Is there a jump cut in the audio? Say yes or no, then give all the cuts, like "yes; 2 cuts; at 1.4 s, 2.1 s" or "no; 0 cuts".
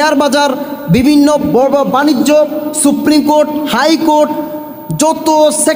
yes; 1 cut; at 2.7 s